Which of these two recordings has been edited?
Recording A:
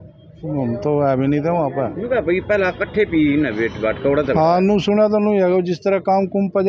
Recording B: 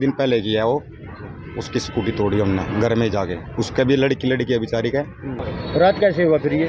B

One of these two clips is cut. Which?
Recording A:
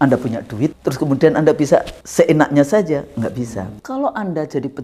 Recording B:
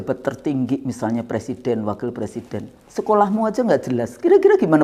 A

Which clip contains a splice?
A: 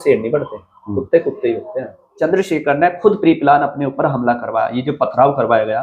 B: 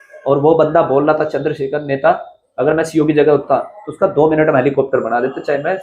A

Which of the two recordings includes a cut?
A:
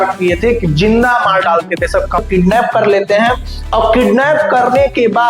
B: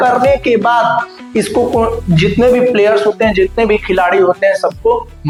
A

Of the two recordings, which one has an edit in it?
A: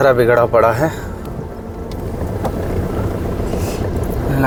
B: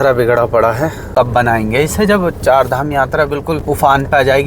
B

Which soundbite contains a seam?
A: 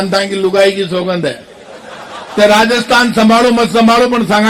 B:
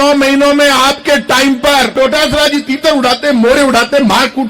B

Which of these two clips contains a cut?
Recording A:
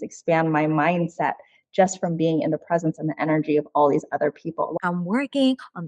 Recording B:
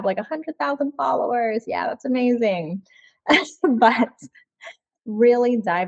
A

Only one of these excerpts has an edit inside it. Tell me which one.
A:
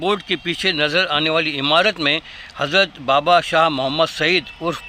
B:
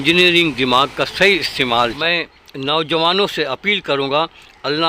B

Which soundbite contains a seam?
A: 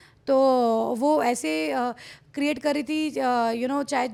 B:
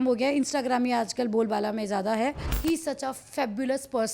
B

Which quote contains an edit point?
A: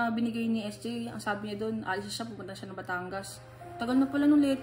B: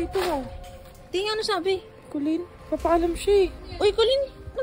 B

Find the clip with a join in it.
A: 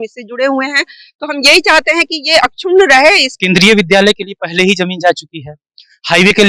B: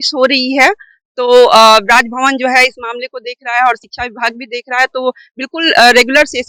A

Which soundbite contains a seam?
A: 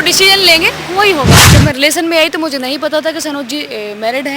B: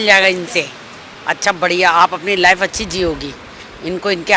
A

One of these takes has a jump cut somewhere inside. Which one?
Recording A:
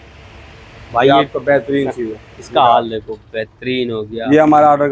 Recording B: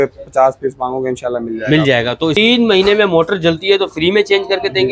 B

